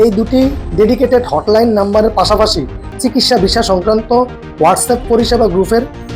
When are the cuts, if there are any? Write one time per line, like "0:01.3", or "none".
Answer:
0:03.0